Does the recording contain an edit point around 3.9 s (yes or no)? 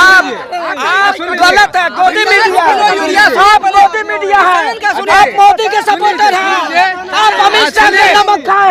no